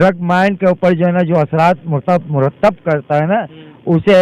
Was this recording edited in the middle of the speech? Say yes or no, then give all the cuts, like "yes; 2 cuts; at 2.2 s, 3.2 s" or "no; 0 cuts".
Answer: no; 0 cuts